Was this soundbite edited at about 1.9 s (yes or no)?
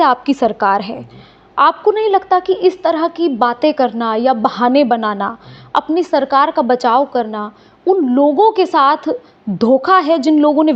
no